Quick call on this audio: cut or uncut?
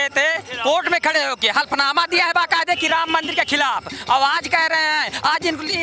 uncut